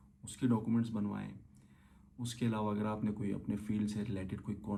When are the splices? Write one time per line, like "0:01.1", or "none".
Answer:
none